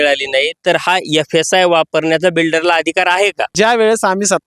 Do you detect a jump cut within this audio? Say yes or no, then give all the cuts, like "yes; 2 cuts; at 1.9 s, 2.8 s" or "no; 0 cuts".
yes; 1 cut; at 3.5 s